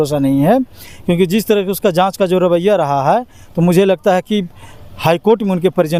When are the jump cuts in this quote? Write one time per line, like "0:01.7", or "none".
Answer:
none